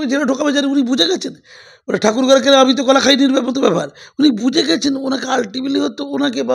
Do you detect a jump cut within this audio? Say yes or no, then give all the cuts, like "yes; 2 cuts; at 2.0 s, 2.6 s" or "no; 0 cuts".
no; 0 cuts